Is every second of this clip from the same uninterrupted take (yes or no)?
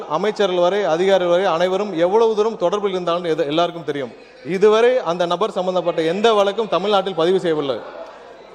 yes